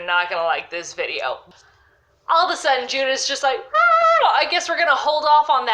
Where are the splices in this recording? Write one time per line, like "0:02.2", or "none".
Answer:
0:01.5